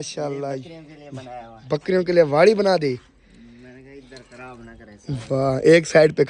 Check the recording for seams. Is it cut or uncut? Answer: uncut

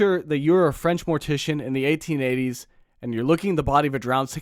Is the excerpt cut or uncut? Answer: uncut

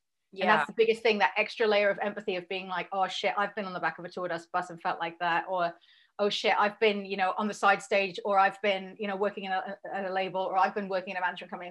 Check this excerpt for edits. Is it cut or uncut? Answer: uncut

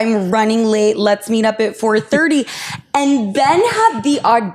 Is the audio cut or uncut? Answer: uncut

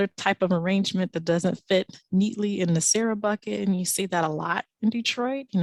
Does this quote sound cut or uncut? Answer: uncut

